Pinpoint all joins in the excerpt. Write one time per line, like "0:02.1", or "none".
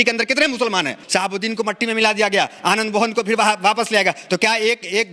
0:01.0